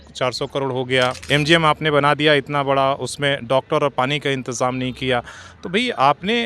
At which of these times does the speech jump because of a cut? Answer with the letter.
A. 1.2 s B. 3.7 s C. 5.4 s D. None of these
A